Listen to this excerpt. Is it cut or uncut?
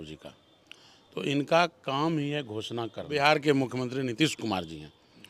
cut